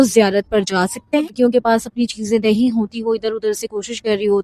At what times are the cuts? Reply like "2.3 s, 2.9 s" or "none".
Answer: 1.3 s